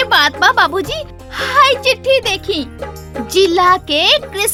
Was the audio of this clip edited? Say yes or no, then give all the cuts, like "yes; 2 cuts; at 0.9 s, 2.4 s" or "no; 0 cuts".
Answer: no; 0 cuts